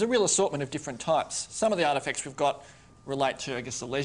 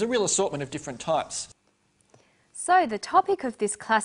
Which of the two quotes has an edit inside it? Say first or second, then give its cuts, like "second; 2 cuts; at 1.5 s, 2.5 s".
first; 1 cut; at 1.4 s